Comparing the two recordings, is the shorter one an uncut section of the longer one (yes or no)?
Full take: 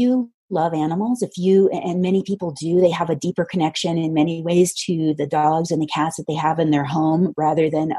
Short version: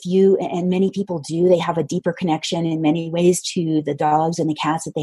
yes